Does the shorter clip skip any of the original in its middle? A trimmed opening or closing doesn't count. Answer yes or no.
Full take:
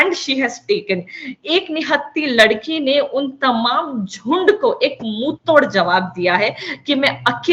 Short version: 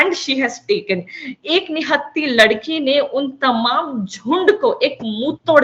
no